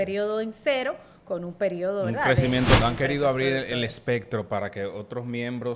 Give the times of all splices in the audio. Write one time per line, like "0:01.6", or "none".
0:02.8